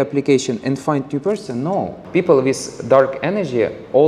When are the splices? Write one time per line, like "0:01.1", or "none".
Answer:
0:02.0